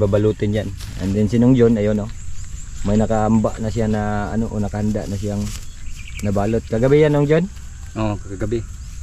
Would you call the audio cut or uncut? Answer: uncut